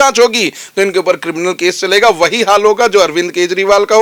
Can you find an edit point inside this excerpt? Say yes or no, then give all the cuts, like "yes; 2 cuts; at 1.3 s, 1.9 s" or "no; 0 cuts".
no; 0 cuts